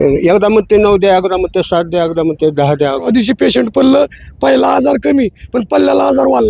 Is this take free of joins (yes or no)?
no